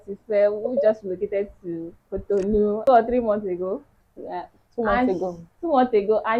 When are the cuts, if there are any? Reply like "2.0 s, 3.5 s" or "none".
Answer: 2.8 s